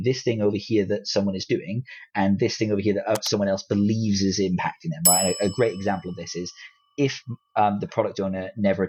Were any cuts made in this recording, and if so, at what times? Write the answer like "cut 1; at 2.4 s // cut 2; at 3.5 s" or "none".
none